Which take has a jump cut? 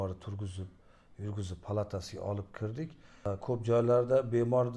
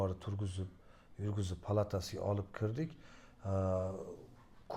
first; 1 cut; at 3.1 s

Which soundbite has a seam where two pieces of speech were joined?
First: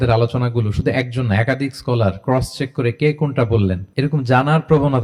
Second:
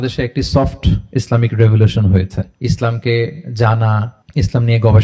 second; 1 cut; at 2.5 s

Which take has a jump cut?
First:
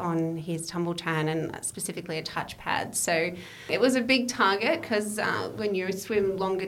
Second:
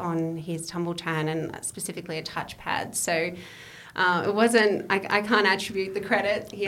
first; 1 cut; at 3.7 s

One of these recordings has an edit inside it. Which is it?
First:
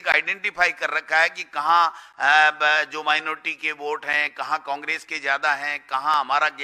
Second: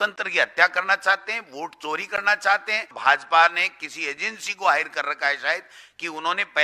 second; 1 cut; at 2.9 s

